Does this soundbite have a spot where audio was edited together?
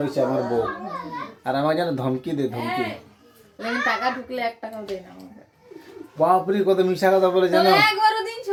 no; 0 cuts

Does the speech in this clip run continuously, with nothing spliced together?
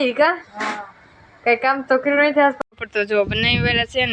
no; 1 cut; at 2.6 s

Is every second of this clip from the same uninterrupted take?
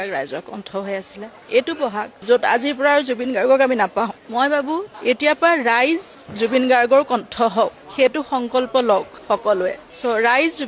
yes; 0 cuts

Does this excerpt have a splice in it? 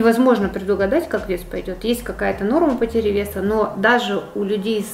no; 0 cuts

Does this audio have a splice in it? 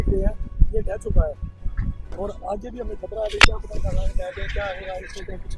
no; 0 cuts

